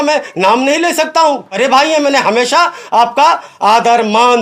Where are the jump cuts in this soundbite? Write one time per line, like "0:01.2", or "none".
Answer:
0:01.6

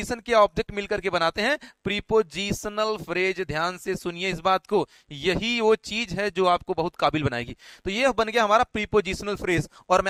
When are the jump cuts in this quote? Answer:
none

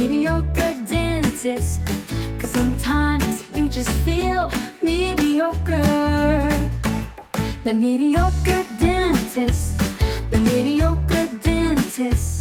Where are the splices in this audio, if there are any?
none

